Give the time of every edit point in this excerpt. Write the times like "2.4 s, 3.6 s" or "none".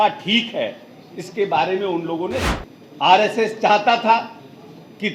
2.5 s

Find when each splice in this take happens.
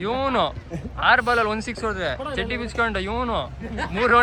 none

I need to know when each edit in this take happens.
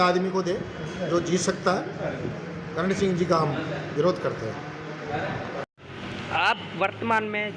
none

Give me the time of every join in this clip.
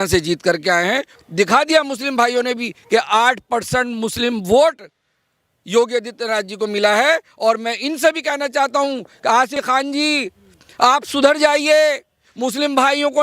1.1 s, 9.5 s

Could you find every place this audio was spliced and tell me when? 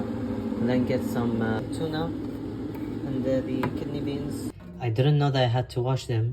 4.4 s

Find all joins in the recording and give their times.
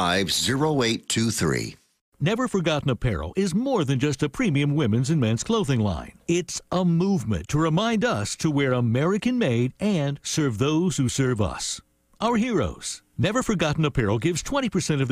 2.0 s

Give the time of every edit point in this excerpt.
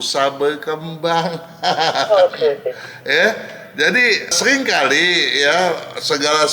none

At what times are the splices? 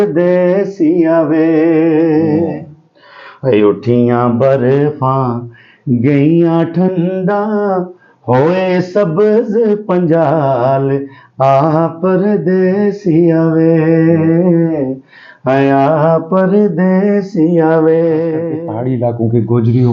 18.6 s

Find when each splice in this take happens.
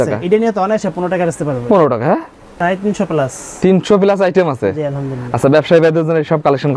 2.4 s

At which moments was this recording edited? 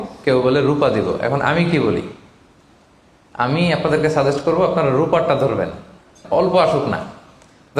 6.2 s

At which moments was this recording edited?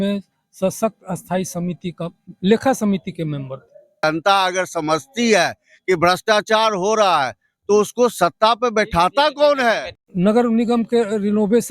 4.0 s, 9.9 s

